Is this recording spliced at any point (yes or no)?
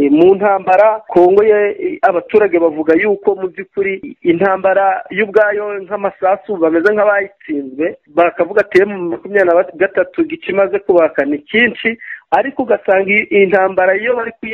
yes